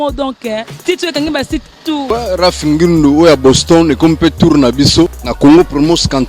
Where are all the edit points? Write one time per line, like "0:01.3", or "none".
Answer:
0:02.0
0:05.2